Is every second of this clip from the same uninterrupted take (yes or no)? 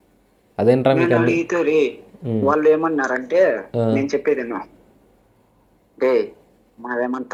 yes